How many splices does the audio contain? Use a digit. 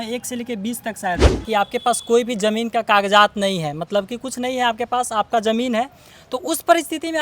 1